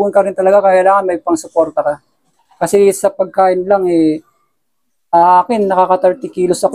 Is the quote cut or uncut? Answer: uncut